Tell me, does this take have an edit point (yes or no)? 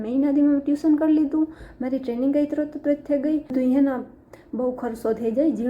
yes